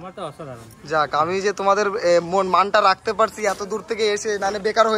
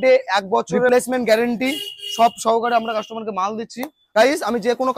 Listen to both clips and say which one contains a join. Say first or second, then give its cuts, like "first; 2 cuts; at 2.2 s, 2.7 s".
second; 2 cuts; at 0.9 s, 4.0 s